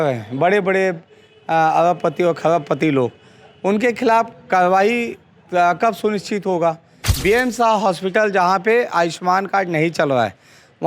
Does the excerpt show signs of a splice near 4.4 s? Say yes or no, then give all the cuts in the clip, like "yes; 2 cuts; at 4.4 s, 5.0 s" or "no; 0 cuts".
no; 1 cut; at 7.1 s